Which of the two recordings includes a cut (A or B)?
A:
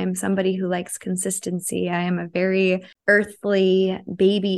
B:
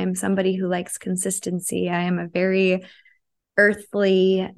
A